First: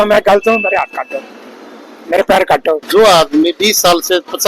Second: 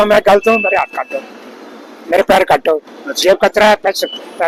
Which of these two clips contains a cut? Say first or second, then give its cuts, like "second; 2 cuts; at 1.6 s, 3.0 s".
first; 1 cut; at 2.8 s